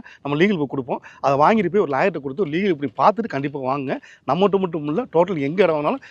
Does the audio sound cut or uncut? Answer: uncut